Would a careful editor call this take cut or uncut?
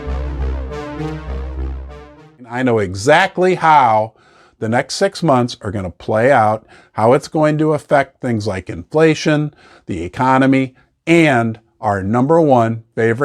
cut